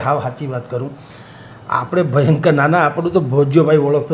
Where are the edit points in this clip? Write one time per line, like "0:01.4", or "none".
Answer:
none